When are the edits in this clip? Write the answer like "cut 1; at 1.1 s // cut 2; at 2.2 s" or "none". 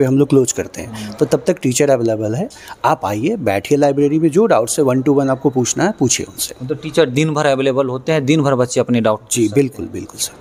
none